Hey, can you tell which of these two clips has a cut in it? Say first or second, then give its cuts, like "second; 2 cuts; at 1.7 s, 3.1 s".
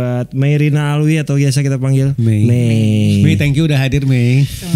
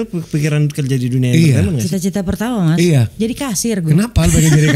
second; 2 cuts; at 1.8 s, 3.9 s